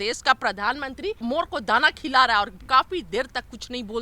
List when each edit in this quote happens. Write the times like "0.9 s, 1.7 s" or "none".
1.2 s